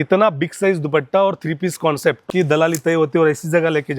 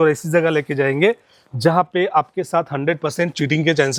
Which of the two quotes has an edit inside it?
first; 1 cut; at 2.3 s

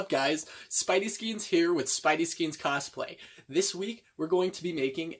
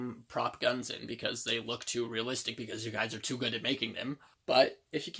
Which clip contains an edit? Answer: second; 1 cut; at 4.3 s

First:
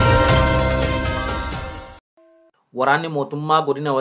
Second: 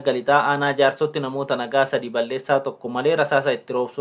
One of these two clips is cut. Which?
first; 2 cuts; at 0.9 s, 2.6 s

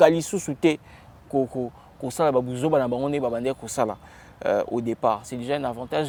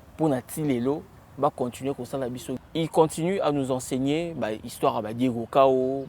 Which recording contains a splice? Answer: second; 2 cuts; at 1.2 s, 2.6 s

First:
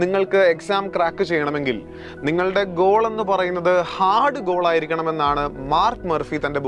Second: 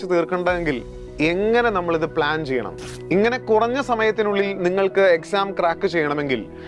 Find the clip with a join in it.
second; 1 cut; at 3.0 s

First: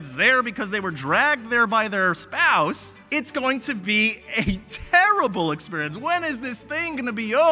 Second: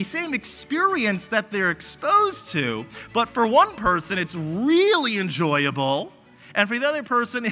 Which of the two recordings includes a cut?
first; 1 cut; at 2.9 s

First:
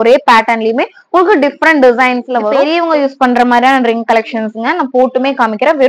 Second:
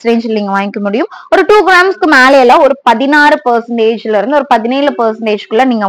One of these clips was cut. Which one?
first; 1 cut; at 2.5 s

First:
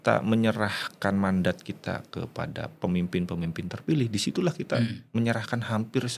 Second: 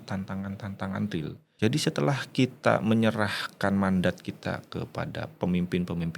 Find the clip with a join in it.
second; 1 cut; at 1.4 s

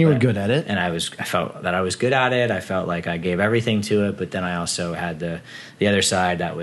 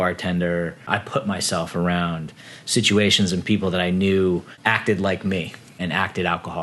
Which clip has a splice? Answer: second; 3 cuts; at 0.8 s, 4.5 s, 5.7 s

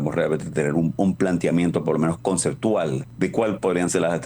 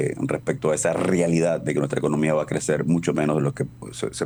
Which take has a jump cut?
first; 1 cut; at 3.0 s

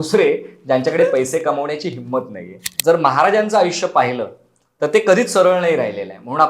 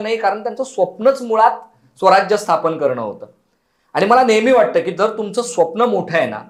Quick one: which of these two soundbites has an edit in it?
first; 1 cut; at 2.7 s

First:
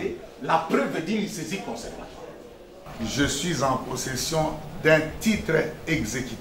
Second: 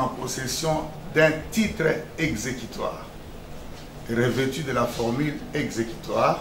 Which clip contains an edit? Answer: first; 1 cut; at 2.8 s

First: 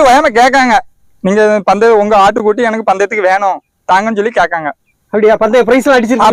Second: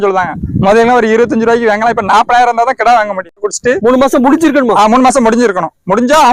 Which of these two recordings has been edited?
second; 1 cut; at 3.5 s

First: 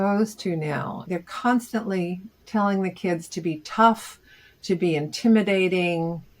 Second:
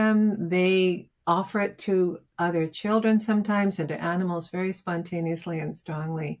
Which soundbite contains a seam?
first; 1 cut; at 1.0 s

